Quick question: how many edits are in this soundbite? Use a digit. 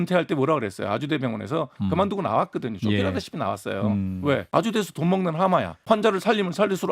2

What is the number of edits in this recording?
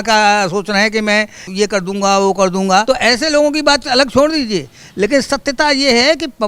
2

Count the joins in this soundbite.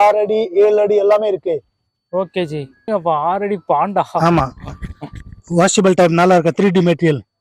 1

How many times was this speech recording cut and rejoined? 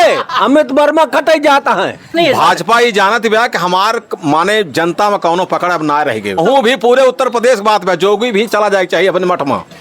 2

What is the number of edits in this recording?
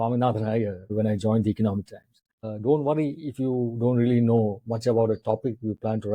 2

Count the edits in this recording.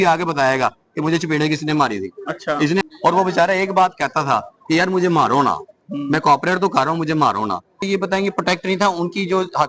2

